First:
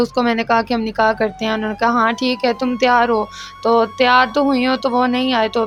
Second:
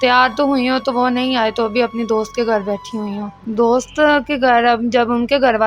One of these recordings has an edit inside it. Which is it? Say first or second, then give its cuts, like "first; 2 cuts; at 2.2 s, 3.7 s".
second; 1 cut; at 3.3 s